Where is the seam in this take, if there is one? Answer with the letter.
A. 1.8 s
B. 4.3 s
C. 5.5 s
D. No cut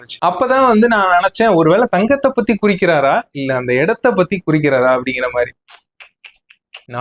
C